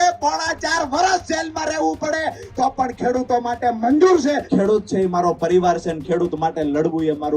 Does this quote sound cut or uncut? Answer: cut